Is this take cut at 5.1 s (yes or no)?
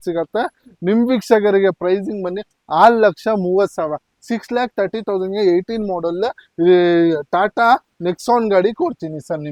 no